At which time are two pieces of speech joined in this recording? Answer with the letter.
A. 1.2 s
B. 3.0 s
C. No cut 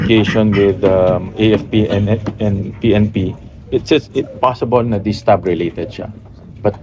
C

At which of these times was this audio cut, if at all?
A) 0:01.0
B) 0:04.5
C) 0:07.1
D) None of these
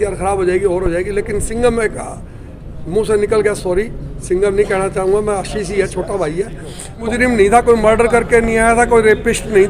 C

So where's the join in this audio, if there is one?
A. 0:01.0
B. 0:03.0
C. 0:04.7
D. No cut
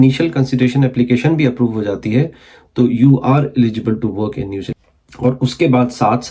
C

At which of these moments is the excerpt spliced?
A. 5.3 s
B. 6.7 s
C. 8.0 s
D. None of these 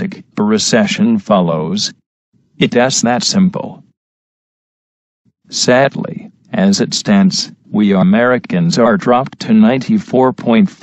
D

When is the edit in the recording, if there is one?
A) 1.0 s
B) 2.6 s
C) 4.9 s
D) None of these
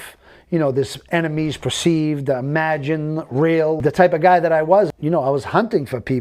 C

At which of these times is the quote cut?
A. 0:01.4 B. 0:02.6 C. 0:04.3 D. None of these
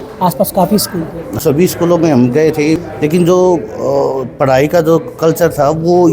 A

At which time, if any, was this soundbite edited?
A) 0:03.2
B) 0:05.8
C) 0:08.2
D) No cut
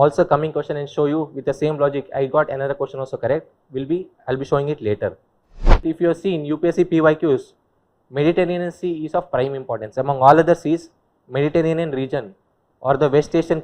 B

